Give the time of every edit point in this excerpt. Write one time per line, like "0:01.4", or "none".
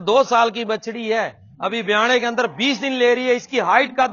none

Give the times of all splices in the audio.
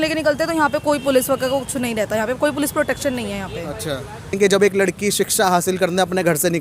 0:04.3

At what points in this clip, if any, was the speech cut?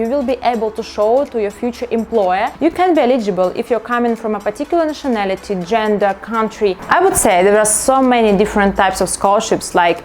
0:02.5
0:06.8

